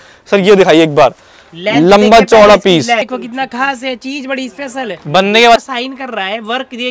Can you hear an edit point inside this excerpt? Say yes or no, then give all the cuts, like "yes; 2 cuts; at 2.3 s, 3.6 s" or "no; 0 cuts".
yes; 2 cuts; at 3.1 s, 5.6 s